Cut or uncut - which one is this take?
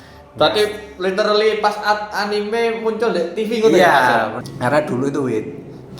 cut